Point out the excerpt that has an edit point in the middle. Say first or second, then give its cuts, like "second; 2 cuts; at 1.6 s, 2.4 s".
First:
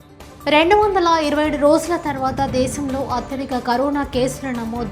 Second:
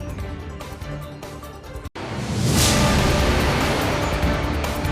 second; 1 cut; at 1.0 s